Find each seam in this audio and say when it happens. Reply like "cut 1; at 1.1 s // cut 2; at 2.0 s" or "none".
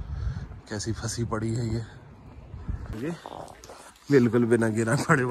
cut 1; at 2.9 s